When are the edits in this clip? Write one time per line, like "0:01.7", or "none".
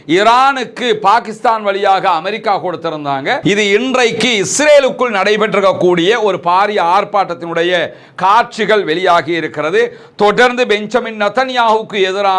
0:03.4